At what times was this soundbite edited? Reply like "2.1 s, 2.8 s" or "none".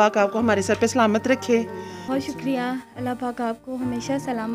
2.0 s